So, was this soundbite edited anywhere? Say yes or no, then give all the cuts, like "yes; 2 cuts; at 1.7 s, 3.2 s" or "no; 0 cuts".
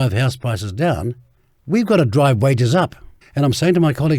yes; 1 cut; at 3.2 s